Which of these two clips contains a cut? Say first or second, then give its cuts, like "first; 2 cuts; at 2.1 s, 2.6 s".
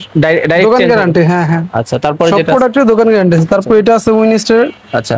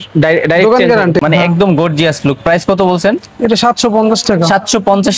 second; 1 cut; at 1.2 s